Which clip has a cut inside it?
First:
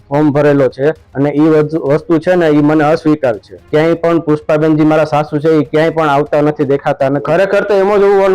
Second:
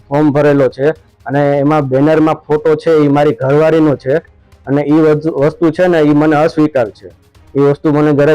first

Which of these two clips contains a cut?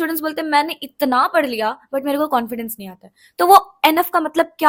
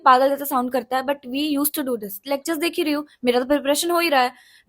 second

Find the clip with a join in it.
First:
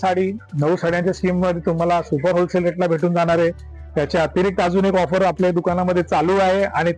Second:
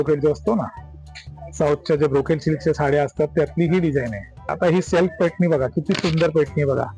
second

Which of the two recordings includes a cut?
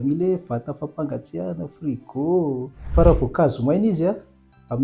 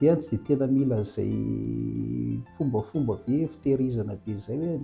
first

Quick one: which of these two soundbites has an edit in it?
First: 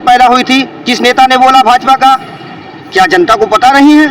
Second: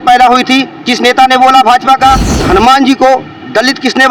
second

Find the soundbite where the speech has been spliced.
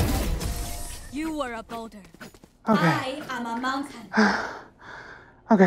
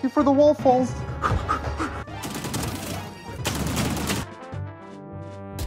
second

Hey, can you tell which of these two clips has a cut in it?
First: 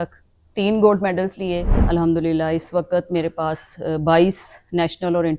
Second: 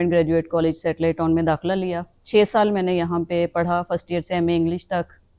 first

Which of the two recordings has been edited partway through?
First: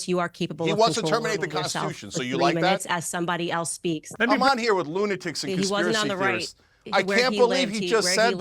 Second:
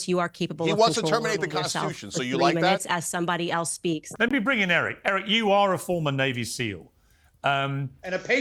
first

